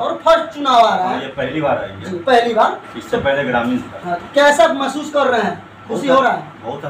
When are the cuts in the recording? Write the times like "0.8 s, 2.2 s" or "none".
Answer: none